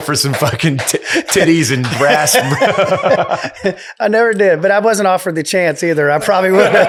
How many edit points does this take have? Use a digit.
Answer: 0